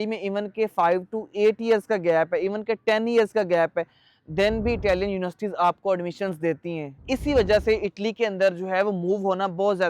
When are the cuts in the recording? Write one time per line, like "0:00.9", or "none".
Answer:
none